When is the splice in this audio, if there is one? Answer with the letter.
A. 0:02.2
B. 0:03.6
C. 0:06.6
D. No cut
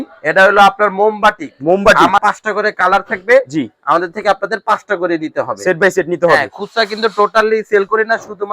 A